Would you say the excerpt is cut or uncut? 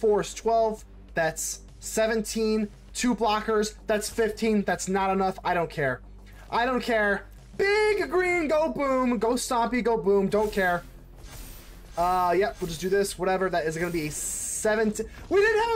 uncut